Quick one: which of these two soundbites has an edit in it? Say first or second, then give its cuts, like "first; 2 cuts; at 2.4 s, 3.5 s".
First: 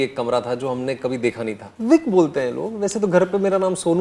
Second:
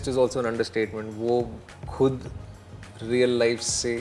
first; 1 cut; at 1.7 s